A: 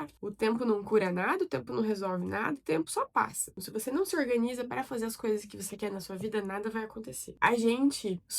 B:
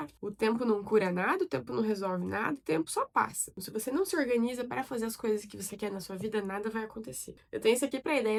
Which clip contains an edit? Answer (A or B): A